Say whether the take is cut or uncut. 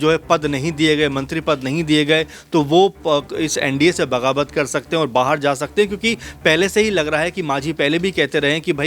uncut